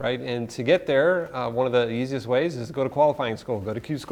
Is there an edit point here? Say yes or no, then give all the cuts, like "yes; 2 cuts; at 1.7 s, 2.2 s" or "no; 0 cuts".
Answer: no; 0 cuts